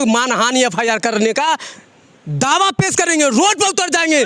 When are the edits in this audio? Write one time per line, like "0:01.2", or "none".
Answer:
none

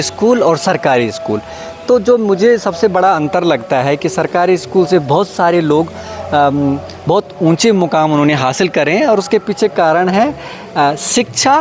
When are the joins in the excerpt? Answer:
none

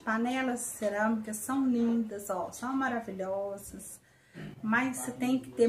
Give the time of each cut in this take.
none

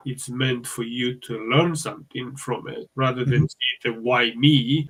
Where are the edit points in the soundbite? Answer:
none

